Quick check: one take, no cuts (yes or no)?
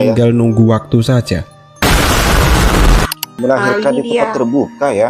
no